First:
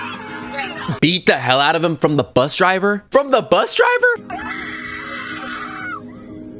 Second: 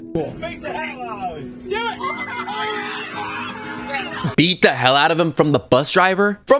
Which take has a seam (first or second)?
first